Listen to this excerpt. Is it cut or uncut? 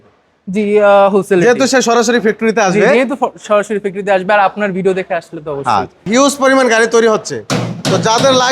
cut